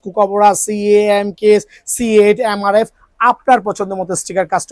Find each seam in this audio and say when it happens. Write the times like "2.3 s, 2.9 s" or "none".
none